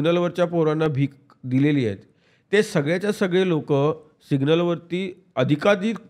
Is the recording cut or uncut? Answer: uncut